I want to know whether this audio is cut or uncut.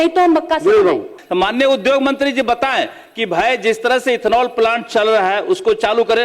cut